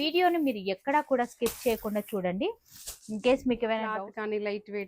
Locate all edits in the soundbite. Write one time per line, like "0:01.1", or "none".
0:03.9